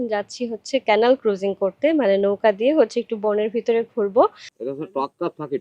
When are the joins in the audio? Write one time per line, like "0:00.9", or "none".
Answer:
0:04.5